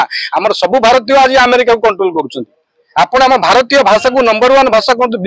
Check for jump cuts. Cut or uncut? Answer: uncut